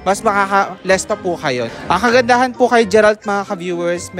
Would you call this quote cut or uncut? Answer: cut